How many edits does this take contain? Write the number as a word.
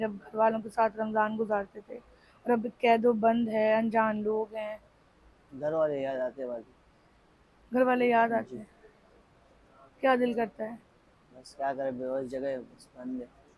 zero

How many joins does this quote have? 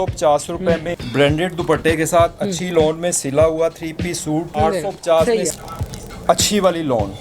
three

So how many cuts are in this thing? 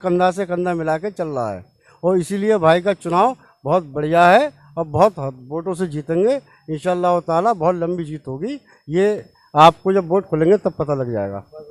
zero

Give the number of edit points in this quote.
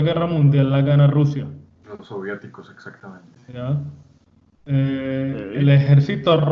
zero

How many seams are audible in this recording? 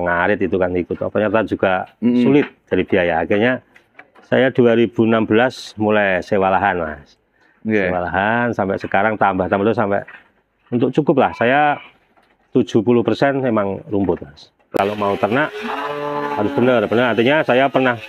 one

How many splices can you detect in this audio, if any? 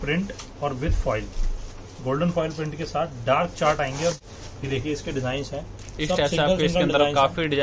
one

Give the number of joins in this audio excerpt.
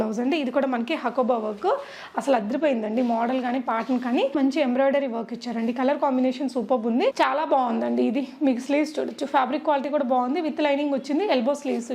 two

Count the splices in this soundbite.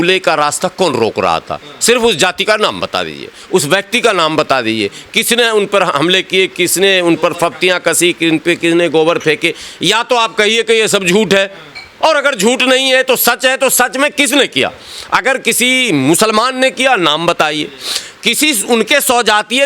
zero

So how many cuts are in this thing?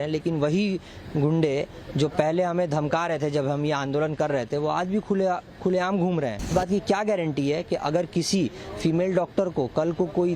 one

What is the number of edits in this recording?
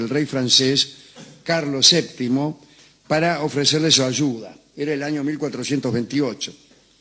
one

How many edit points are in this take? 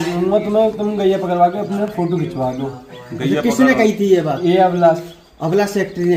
zero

